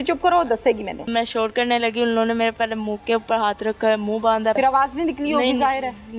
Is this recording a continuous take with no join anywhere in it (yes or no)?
no